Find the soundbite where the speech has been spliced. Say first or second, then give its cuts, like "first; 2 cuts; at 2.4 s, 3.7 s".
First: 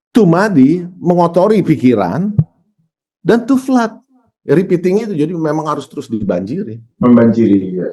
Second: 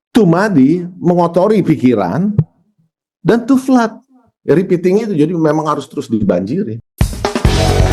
first; 1 cut; at 6.8 s